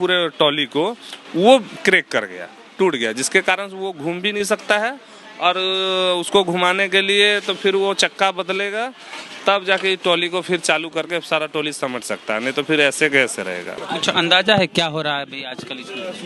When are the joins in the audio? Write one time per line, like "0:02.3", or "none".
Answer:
none